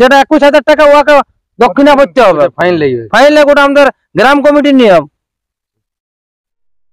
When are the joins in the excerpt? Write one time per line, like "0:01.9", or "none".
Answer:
none